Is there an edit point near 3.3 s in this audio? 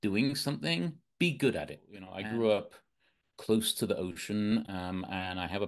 no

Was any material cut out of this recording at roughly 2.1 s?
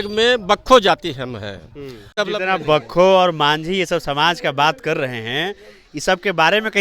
yes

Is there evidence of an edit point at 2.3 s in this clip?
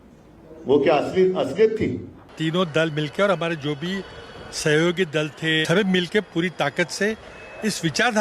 yes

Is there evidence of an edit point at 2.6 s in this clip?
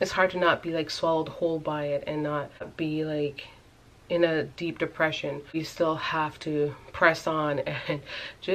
yes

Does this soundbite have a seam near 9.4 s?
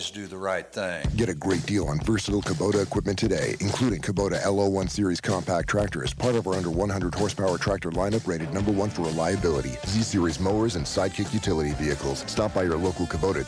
no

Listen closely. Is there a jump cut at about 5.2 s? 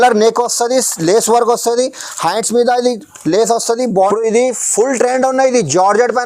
no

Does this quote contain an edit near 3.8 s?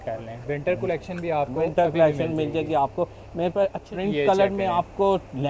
yes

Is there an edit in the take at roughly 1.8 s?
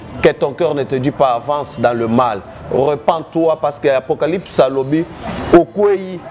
no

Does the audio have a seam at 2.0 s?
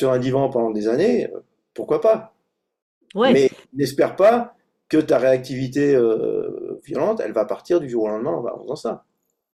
no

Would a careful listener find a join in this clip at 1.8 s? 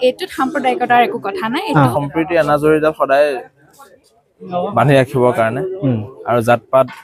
yes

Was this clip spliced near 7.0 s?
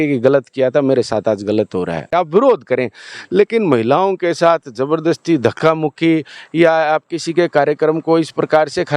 no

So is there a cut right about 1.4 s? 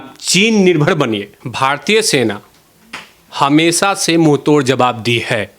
yes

